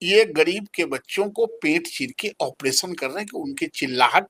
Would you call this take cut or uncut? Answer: uncut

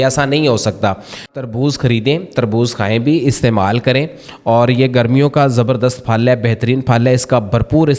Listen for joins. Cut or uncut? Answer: cut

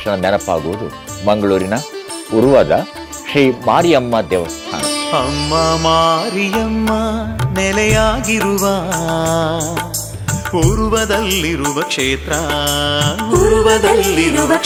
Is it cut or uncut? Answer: uncut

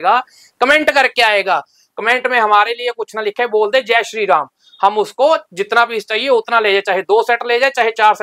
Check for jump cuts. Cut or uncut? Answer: uncut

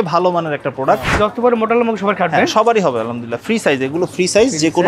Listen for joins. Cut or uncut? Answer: cut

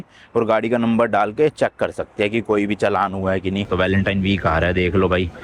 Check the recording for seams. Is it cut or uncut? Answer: cut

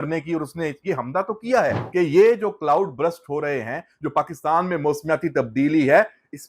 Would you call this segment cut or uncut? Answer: cut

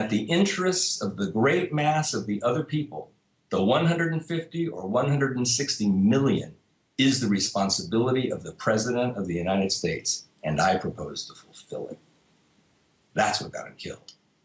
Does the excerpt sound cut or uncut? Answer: uncut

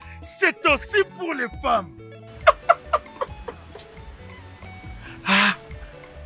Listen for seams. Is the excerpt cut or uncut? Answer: uncut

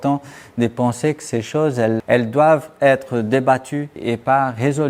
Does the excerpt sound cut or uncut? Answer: cut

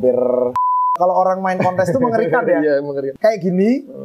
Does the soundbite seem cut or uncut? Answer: cut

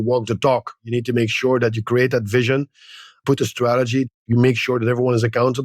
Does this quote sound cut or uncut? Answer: cut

